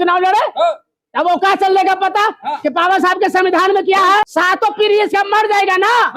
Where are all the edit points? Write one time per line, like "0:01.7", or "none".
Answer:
0:04.2